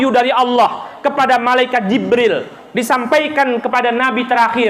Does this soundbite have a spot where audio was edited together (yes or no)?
no